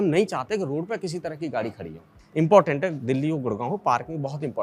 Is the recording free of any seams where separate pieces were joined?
yes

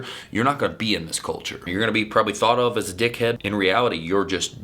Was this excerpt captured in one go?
no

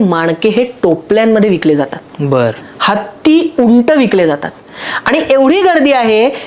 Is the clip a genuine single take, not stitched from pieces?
yes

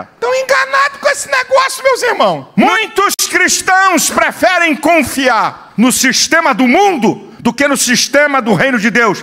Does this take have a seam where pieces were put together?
yes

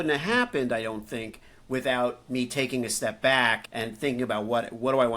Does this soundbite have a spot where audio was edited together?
yes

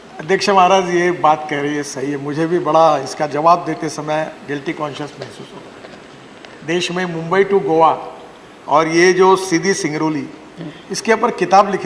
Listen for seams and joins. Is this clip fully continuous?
yes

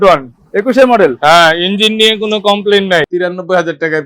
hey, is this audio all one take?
no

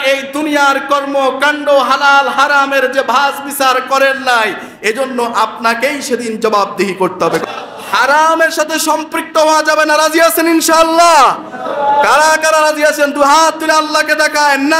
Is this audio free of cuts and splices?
no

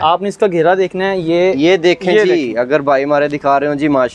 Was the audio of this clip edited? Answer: no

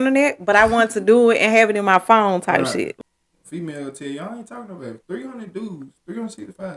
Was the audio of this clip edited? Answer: yes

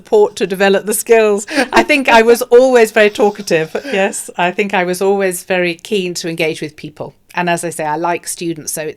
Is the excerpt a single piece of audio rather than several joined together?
yes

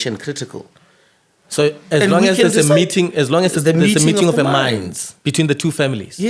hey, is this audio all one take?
yes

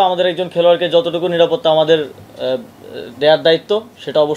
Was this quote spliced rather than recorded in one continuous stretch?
no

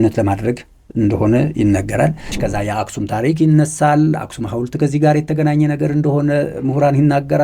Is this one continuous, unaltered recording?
no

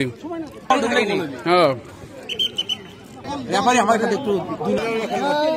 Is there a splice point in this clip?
no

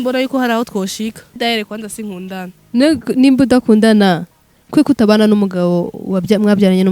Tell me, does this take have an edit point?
yes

